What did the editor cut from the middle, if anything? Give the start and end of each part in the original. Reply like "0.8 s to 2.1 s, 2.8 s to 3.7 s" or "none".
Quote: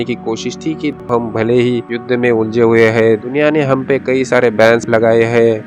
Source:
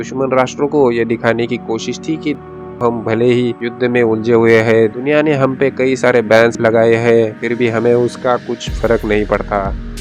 2.4 s to 2.7 s